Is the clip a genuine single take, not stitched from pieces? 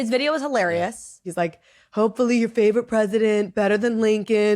no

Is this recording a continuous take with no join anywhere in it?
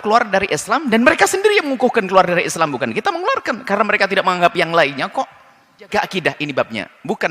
no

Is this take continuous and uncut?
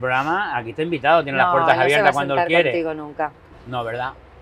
yes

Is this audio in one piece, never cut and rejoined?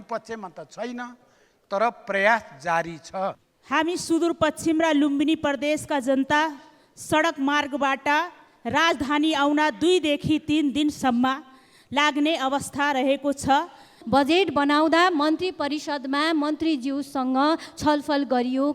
no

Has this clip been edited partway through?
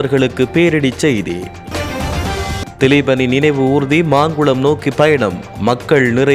yes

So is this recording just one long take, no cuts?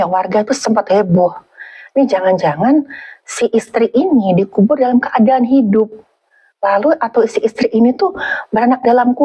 yes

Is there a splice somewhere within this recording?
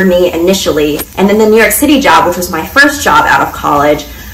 yes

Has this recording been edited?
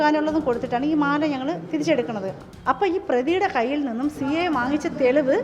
yes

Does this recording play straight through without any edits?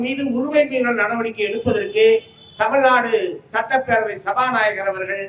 yes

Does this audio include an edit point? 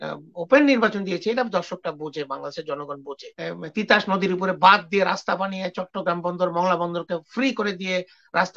yes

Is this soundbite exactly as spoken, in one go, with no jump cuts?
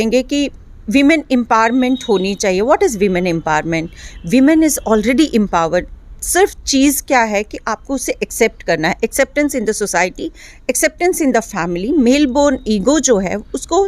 yes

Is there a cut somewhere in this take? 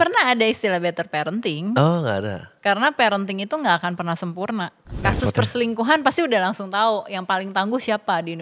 yes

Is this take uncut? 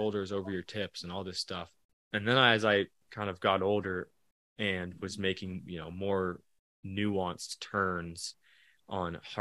no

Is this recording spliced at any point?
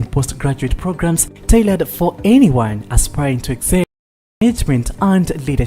yes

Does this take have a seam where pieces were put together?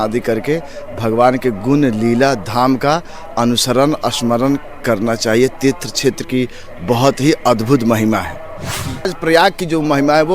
yes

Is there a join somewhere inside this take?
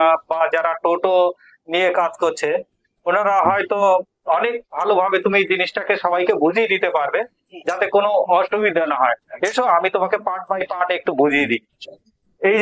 no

